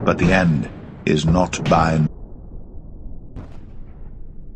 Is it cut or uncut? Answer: uncut